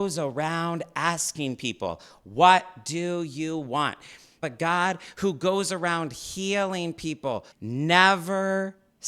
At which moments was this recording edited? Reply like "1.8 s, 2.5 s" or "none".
4.4 s, 7.5 s

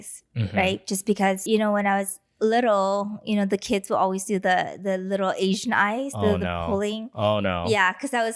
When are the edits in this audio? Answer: 1.4 s

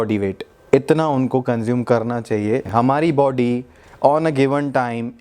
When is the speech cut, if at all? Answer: 2.7 s

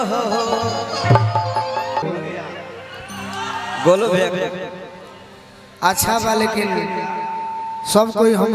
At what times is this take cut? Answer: 2.0 s

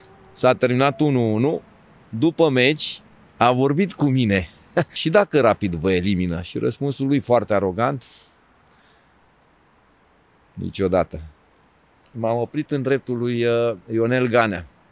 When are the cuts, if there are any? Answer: 5.0 s, 12.0 s

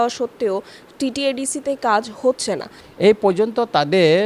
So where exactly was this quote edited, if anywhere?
2.7 s

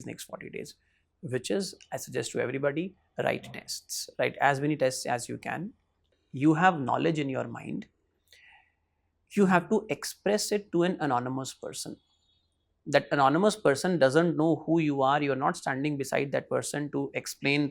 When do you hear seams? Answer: 6.1 s

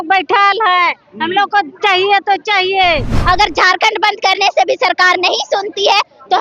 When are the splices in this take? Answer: 3.2 s

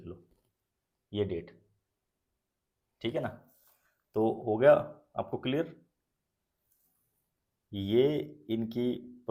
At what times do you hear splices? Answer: none

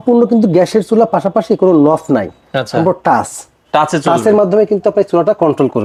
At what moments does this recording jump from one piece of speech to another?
none

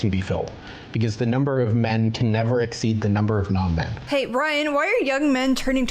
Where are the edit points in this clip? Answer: 4.0 s

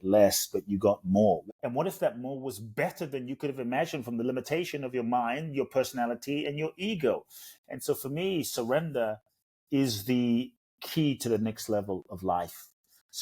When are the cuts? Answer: 1.4 s

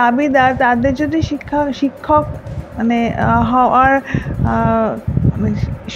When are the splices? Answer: none

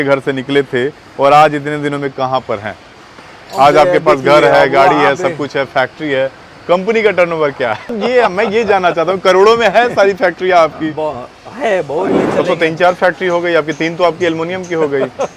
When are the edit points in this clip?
8.0 s, 12.1 s

